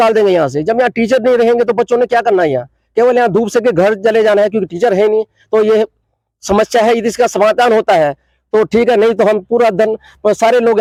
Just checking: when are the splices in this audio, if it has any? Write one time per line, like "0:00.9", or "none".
none